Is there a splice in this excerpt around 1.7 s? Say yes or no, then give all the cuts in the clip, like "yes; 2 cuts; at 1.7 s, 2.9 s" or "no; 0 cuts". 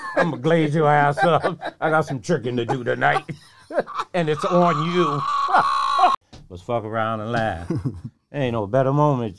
no; 1 cut; at 6.2 s